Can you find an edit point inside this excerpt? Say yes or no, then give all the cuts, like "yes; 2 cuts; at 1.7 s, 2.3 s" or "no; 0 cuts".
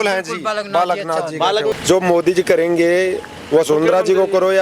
yes; 1 cut; at 1.7 s